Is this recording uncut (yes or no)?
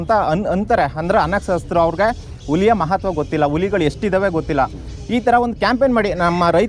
yes